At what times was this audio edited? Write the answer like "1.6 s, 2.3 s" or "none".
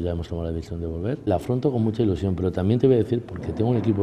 1.2 s